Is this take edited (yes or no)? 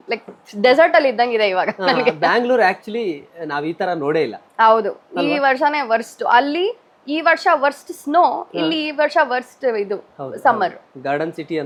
no